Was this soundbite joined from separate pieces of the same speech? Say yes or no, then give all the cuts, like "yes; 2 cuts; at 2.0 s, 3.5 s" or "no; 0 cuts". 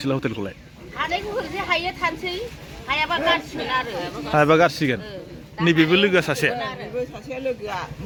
no; 0 cuts